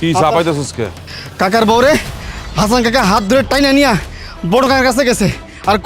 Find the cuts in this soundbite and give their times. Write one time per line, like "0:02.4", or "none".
0:01.0